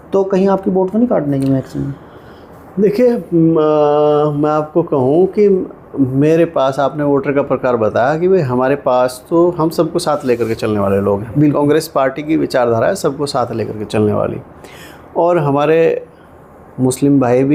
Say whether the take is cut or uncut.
uncut